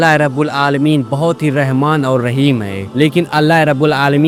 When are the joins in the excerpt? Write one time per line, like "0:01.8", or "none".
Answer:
none

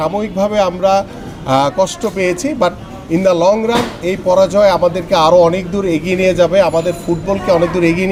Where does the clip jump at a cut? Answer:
none

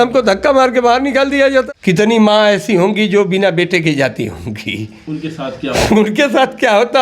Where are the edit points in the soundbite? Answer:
0:01.7

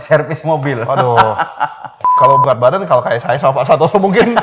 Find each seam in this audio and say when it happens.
0:02.2

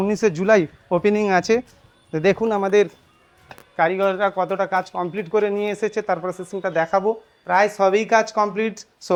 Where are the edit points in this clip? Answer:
none

